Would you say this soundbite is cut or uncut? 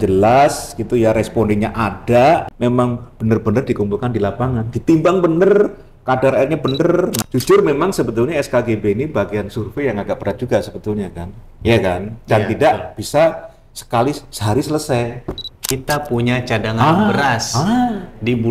cut